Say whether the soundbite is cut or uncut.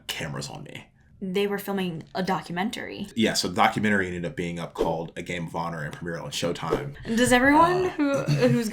cut